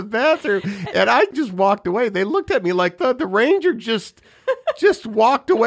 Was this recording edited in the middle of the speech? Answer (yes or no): yes